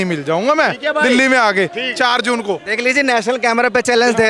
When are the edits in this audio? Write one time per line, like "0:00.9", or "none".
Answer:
none